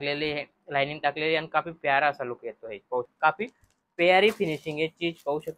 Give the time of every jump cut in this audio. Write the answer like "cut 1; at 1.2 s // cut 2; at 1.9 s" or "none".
cut 1; at 3.1 s